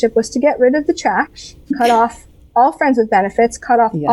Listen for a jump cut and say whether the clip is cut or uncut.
cut